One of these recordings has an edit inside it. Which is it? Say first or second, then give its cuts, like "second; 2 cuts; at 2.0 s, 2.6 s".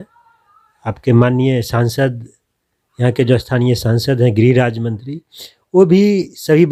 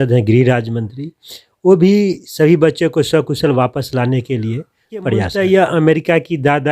second; 1 cut; at 5.3 s